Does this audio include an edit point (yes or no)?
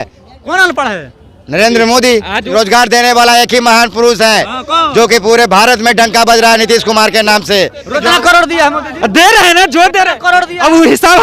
yes